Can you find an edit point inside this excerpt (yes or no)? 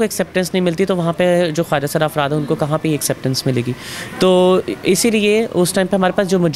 no